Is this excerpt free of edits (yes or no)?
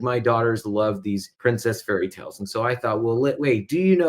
no